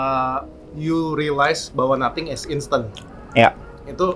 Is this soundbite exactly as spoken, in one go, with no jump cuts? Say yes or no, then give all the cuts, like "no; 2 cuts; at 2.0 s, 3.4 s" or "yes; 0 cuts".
yes; 0 cuts